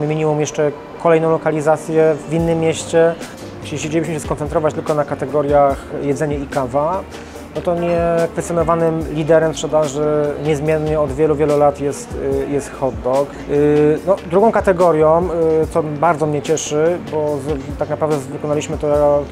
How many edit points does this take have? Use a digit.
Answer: 2